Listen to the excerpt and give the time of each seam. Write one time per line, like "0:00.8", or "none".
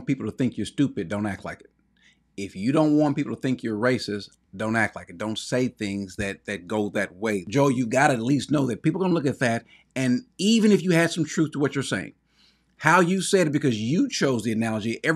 0:07.5